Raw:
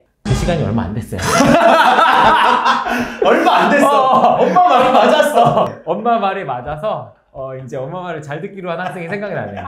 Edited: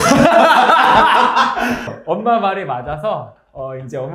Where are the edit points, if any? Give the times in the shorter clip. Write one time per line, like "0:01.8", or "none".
0:01.9